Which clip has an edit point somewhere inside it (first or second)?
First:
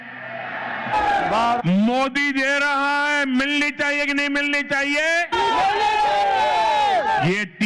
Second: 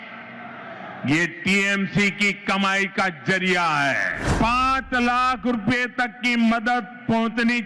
second